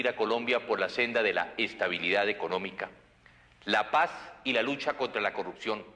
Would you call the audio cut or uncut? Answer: cut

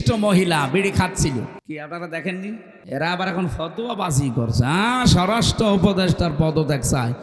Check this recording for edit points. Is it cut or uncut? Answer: cut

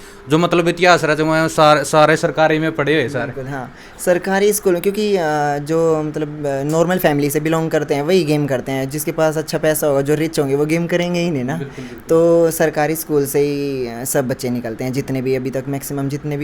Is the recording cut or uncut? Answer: uncut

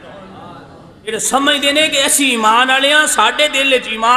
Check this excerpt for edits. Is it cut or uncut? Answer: cut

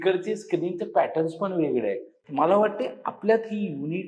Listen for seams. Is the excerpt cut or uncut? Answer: uncut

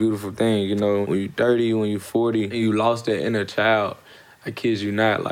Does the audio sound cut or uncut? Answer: cut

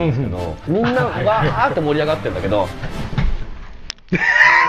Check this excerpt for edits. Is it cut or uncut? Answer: uncut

